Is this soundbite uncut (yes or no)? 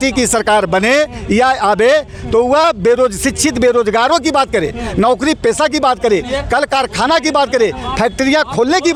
yes